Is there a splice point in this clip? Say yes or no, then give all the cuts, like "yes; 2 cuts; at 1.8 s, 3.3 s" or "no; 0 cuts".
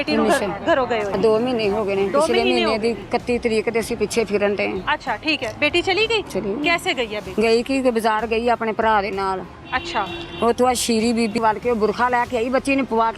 yes; 4 cuts; at 1.1 s, 6.3 s, 7.3 s, 11.4 s